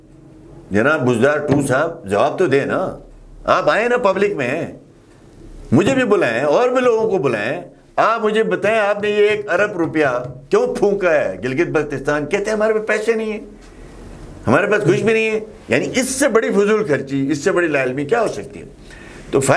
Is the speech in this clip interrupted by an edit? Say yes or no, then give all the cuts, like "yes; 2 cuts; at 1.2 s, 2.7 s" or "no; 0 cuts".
no; 0 cuts